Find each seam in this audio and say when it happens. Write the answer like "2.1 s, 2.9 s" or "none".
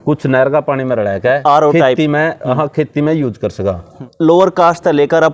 4.0 s